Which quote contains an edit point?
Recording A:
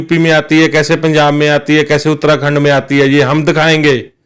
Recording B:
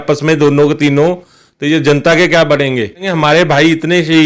B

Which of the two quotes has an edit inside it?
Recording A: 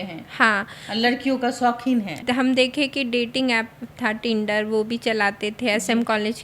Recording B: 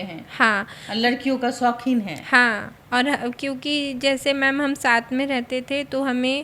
A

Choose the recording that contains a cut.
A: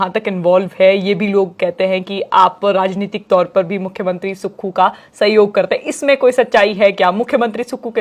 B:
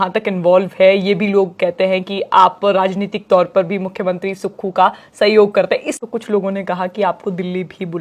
B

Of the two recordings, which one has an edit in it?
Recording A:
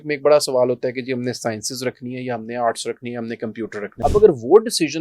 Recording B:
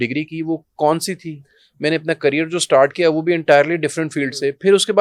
A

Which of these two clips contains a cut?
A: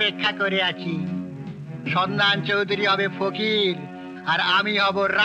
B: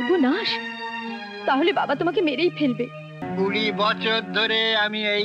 B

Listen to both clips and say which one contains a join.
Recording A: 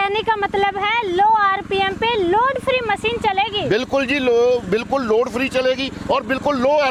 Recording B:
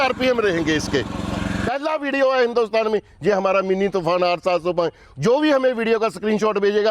B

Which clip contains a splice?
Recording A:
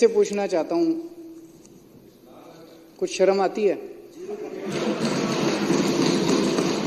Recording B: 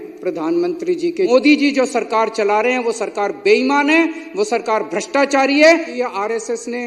B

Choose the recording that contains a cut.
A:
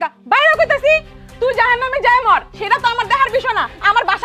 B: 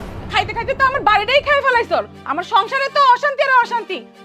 A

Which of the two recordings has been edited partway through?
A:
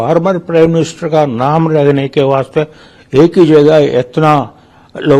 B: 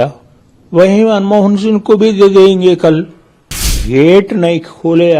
B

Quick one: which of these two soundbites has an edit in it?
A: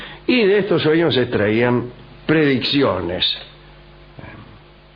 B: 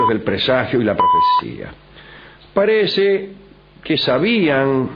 A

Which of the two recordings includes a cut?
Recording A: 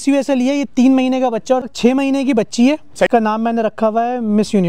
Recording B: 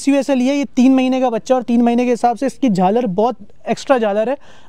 A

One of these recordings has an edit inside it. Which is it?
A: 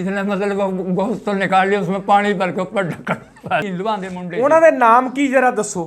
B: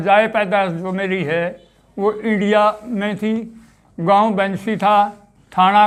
A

